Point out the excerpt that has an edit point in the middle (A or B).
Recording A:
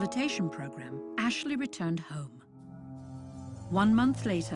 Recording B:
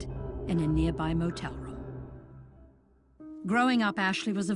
B